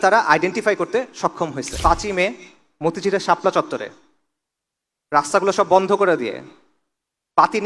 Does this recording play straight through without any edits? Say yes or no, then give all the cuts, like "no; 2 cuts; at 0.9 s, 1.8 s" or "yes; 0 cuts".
no; 1 cut; at 1.7 s